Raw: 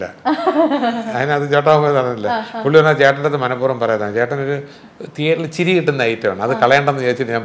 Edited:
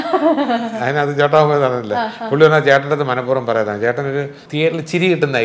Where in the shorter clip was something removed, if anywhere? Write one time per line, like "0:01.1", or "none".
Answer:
0:04.4